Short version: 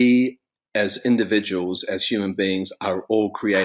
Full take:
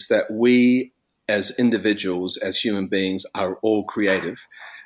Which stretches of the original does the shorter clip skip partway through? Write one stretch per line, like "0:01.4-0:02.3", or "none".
none